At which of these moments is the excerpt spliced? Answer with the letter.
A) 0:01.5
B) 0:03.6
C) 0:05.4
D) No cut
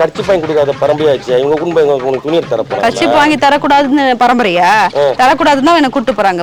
D